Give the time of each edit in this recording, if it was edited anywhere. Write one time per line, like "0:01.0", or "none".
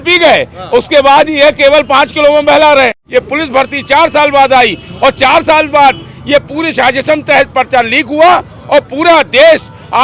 0:03.0